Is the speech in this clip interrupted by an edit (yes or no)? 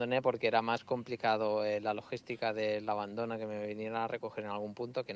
no